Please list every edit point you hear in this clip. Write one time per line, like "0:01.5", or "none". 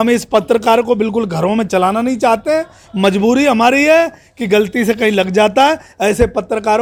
none